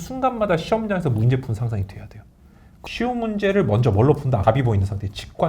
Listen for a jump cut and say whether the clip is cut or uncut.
cut